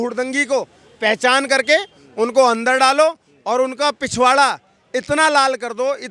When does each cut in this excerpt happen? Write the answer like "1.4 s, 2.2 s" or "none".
none

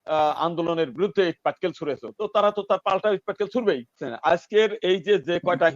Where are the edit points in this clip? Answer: 4.1 s

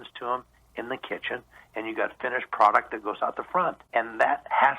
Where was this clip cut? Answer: 3.8 s

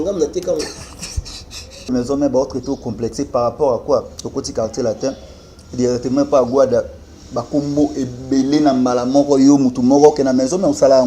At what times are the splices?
1.9 s

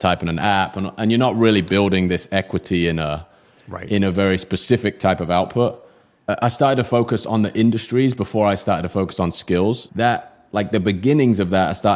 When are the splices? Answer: 9.9 s

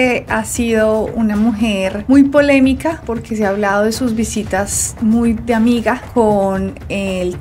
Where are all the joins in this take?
none

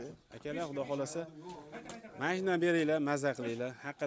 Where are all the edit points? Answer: none

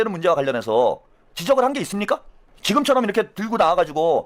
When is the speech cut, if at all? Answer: none

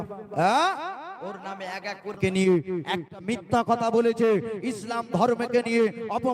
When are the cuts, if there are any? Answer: 2.2 s, 3.6 s

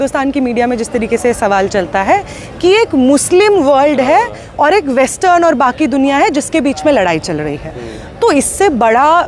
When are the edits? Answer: none

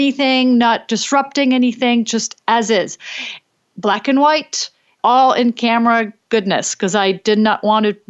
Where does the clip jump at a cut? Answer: none

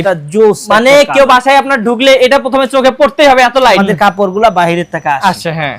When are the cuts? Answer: 3.8 s

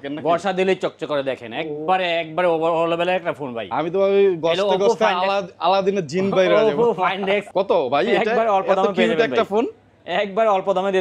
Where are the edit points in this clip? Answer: 7.5 s

